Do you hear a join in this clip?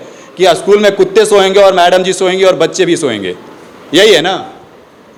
no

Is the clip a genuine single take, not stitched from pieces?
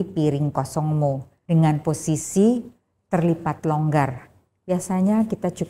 no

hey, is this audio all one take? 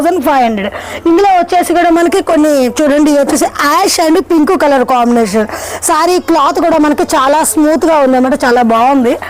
yes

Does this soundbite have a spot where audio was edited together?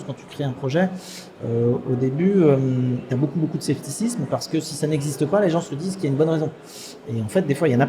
no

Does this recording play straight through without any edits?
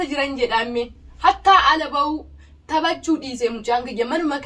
no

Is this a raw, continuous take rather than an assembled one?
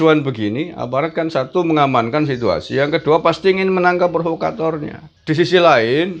no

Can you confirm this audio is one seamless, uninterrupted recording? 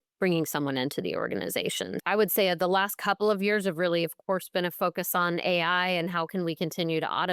no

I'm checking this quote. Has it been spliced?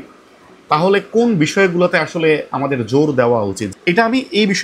yes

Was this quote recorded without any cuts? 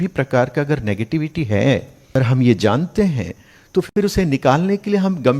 no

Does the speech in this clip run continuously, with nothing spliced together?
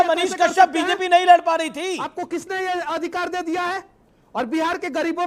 yes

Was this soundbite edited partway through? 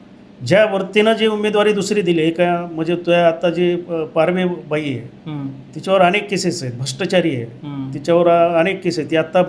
no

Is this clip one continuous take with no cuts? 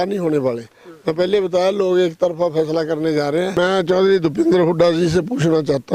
no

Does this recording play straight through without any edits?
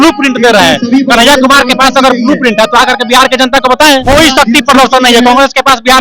no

